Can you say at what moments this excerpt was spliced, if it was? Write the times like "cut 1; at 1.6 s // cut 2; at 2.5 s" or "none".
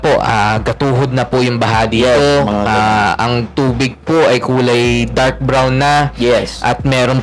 none